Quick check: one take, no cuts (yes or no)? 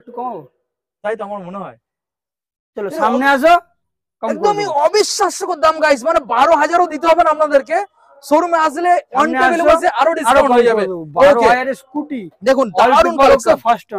yes